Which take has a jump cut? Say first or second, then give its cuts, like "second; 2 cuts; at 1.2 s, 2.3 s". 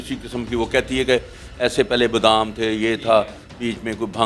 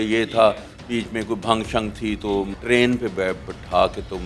second; 1 cut; at 2.5 s